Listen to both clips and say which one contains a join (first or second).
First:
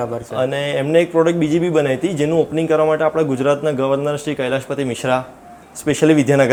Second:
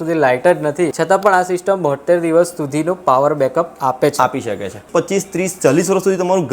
second